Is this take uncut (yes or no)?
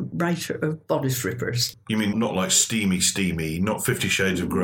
no